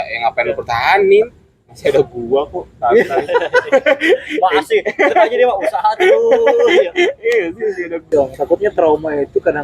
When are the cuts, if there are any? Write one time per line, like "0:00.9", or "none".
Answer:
0:08.1